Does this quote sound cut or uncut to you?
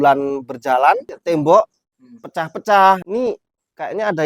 cut